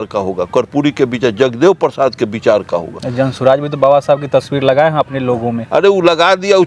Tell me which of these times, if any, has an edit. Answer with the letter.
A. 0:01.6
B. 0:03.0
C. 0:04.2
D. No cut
B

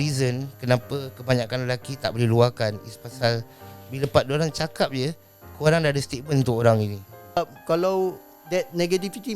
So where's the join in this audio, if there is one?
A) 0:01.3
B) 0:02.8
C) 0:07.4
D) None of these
C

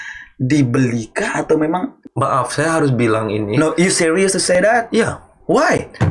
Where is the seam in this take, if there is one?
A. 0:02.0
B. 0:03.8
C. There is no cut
A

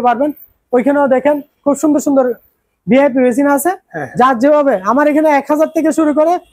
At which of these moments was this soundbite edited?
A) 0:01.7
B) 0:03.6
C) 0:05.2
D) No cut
D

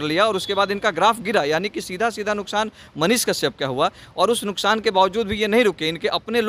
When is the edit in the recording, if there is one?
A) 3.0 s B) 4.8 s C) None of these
C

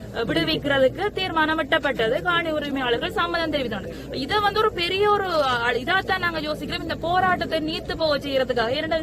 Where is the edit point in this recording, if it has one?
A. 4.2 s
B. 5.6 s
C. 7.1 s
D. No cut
D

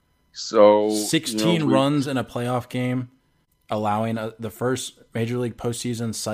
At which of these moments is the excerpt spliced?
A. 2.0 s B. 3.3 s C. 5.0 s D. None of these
D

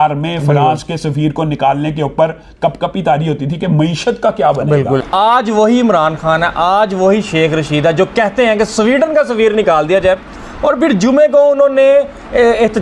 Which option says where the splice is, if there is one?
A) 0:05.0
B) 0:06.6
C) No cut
A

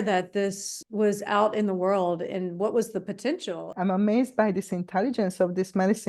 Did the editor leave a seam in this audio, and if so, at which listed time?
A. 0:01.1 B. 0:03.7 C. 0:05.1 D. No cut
B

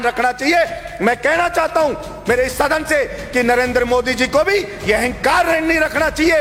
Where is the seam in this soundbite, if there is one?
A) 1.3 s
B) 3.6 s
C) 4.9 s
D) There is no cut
D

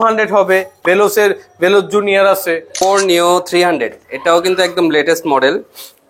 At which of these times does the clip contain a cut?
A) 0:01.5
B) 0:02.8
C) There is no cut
B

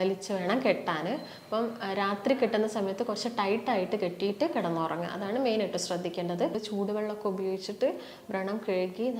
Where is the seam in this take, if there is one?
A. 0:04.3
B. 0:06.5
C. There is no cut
B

